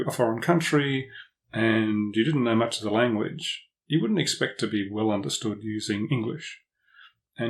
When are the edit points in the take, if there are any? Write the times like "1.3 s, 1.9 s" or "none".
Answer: none